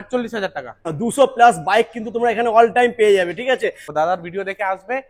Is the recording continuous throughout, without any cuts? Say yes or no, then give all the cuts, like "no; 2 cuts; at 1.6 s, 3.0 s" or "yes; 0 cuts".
no; 2 cuts; at 0.9 s, 3.8 s